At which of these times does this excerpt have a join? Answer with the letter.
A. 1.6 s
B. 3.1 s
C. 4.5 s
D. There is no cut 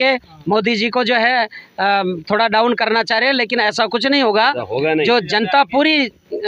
D